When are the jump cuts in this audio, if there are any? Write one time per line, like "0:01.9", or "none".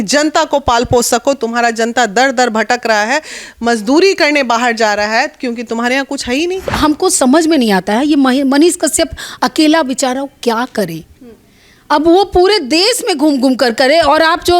0:06.6